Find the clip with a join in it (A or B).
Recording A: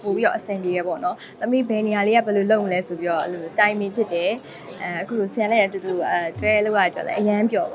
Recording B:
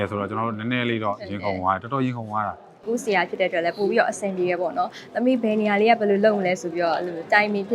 B